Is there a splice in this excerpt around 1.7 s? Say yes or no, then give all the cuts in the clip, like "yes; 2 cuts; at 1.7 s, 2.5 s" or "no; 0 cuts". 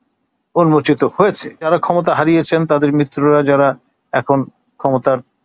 yes; 1 cut; at 1.7 s